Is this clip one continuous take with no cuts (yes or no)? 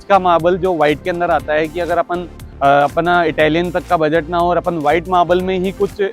yes